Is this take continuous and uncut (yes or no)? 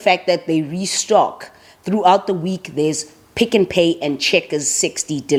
yes